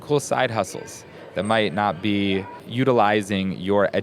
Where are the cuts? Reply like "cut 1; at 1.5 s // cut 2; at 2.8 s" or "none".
cut 1; at 2.6 s